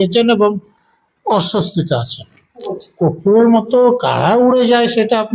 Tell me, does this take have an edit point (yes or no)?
yes